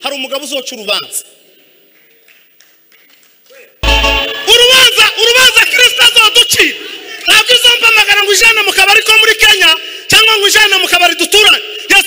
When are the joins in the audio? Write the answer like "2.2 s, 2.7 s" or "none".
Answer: 3.8 s